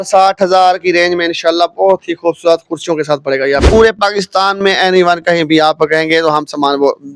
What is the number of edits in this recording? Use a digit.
1